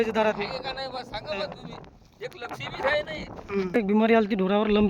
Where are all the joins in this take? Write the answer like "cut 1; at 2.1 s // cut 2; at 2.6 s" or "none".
cut 1; at 3.8 s